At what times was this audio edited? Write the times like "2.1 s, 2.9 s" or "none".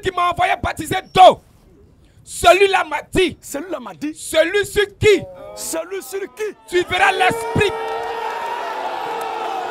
none